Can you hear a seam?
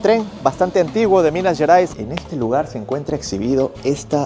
yes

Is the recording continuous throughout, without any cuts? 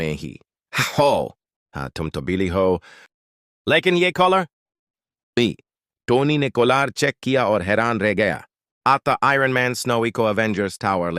no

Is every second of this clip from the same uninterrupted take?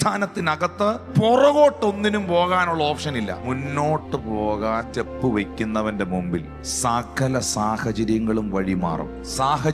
no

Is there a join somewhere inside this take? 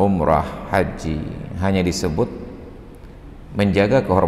no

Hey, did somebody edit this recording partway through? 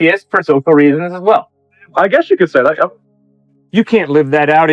no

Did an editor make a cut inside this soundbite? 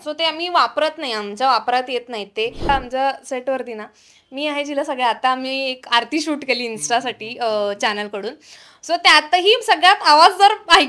yes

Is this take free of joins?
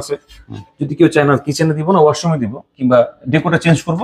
yes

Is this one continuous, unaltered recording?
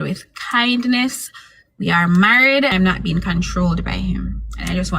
no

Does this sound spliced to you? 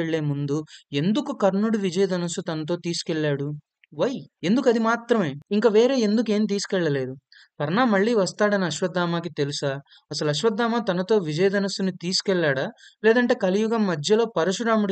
yes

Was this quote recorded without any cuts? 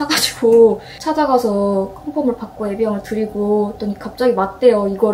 no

